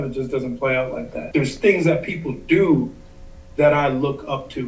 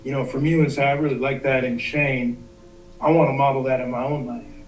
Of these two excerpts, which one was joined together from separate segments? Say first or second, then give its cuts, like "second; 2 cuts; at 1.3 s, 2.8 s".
first; 1 cut; at 1.1 s